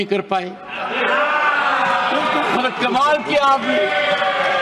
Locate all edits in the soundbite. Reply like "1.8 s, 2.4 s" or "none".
none